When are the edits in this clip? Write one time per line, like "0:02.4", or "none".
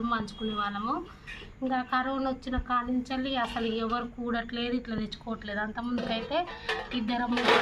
none